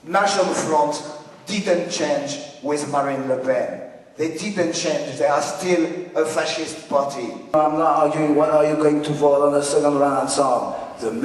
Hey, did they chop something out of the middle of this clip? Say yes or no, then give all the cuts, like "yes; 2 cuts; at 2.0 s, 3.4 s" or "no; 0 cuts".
yes; 1 cut; at 7.5 s